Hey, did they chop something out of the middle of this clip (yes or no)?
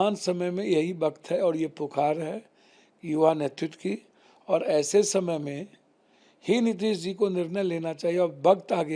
no